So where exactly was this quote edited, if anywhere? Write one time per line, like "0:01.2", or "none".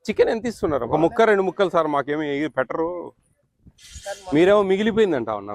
0:00.9